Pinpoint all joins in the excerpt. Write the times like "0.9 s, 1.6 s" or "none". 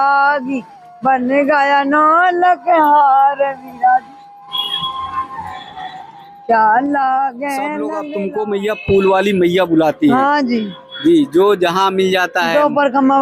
8.0 s